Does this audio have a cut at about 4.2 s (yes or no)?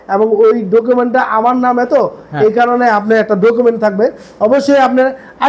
no